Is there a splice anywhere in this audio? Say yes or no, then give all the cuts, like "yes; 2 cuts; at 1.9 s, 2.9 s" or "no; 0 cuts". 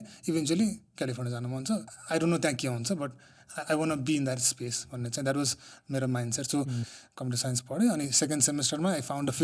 yes; 2 cuts; at 1.9 s, 6.9 s